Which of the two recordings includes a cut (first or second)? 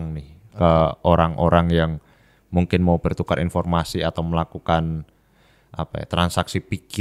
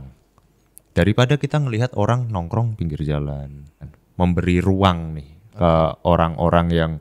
second